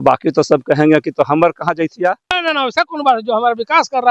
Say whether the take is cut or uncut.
cut